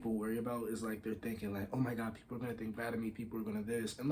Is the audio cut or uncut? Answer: uncut